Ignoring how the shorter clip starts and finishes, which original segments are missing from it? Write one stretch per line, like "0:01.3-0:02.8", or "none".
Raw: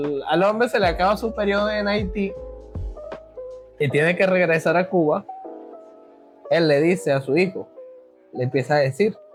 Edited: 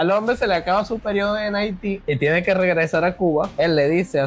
0:02.3-0:03.7
0:05.2-0:06.4